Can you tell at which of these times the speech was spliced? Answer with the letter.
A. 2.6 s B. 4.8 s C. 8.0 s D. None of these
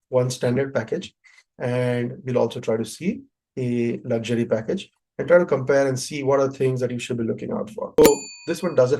C